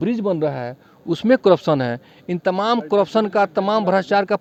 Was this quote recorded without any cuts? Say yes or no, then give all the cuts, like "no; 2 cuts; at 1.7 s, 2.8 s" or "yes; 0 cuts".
yes; 0 cuts